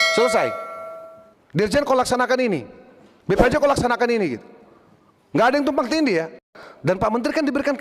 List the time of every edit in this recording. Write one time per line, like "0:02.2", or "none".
0:06.4